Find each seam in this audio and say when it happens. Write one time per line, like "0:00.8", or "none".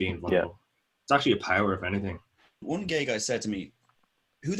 0:02.6